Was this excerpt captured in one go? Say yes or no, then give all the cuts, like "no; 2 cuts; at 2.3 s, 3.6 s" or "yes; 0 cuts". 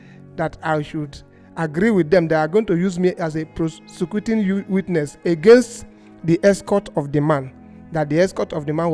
yes; 0 cuts